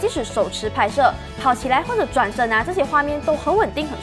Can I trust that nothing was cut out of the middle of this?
yes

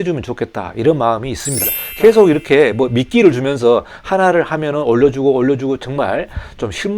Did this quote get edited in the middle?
yes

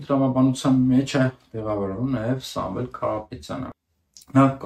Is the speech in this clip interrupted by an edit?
yes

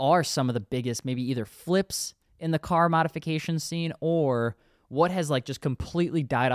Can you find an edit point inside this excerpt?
no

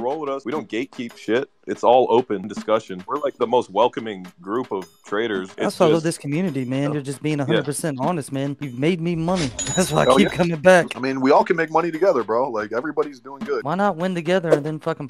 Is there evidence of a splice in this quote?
no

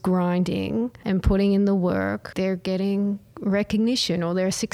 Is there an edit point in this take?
yes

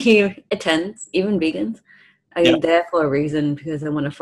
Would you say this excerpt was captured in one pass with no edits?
yes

